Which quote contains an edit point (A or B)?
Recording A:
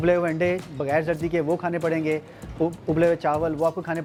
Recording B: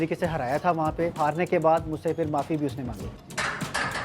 B